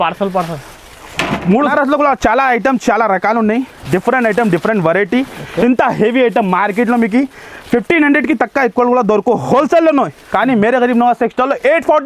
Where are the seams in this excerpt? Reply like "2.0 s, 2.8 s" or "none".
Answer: 1.7 s